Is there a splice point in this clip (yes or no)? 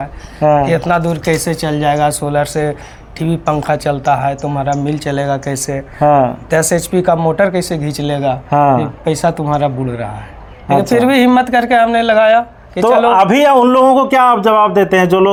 no